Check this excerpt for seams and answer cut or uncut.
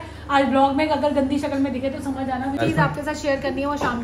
cut